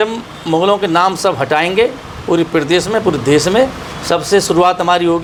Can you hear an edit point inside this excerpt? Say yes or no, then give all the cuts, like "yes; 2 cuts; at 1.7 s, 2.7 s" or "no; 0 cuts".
no; 0 cuts